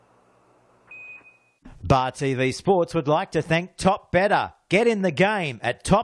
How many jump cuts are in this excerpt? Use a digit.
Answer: 1